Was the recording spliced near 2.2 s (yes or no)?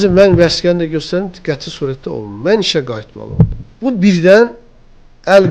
no